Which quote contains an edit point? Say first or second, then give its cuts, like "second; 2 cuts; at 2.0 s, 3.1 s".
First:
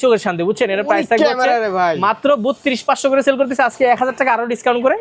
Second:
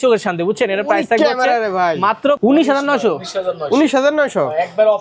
second; 1 cut; at 2.4 s